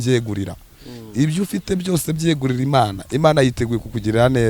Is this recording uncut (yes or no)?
yes